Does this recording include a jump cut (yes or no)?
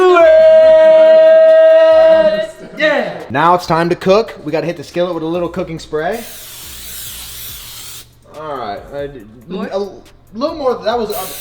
yes